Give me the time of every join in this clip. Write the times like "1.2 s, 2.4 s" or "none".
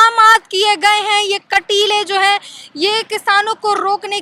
none